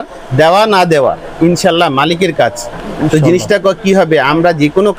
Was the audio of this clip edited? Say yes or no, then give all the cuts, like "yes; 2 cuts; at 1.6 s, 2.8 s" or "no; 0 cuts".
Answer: no; 0 cuts